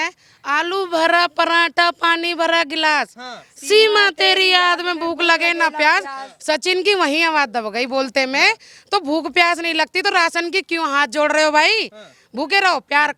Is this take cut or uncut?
uncut